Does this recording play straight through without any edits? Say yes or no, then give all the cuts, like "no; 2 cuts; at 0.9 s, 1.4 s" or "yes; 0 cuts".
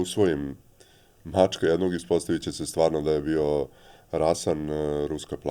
yes; 0 cuts